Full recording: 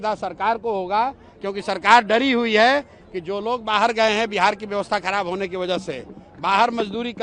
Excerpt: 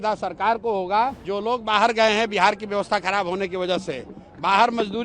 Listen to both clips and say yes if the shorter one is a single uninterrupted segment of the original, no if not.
no